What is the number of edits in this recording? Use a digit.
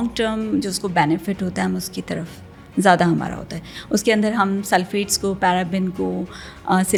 0